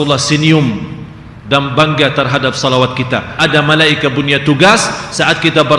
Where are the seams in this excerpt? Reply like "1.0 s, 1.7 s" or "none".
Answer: 3.3 s